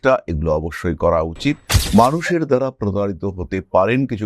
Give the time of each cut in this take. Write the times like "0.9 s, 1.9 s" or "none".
1.7 s